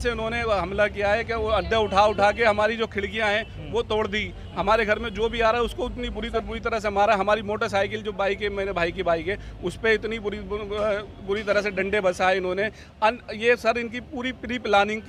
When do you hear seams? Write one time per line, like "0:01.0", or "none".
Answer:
none

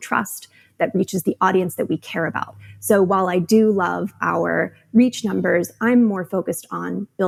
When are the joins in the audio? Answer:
none

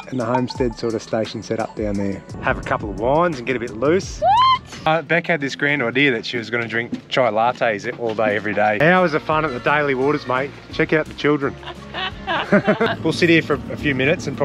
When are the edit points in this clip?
0:02.3
0:04.9
0:08.8
0:12.9

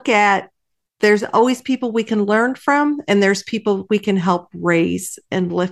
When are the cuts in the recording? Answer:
none

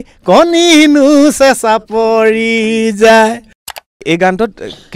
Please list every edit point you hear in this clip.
0:04.0

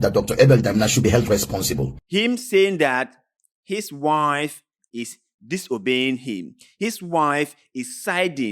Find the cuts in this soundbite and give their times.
0:02.0

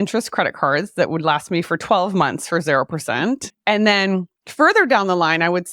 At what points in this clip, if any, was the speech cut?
0:03.5

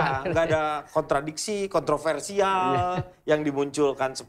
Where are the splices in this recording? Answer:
none

